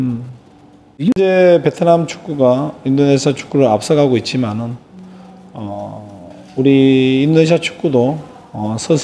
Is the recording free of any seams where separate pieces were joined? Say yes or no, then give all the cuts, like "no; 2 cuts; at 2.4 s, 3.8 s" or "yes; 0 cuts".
no; 1 cut; at 1.1 s